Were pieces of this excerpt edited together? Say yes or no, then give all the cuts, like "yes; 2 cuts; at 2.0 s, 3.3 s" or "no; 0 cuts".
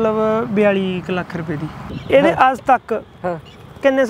yes; 1 cut; at 1.9 s